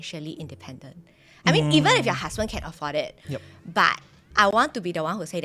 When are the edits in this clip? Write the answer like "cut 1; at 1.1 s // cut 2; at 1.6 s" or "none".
none

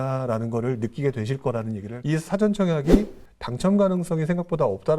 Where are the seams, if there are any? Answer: cut 1; at 1.9 s

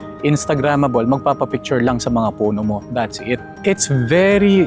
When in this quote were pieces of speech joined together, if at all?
cut 1; at 3.5 s

